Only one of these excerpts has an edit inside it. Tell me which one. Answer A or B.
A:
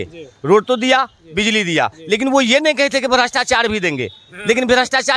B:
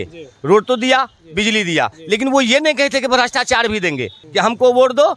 B